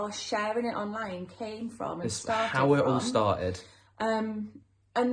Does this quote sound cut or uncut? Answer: uncut